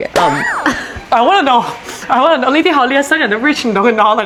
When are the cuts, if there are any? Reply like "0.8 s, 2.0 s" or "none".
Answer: none